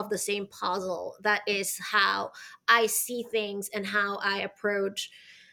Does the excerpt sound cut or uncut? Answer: uncut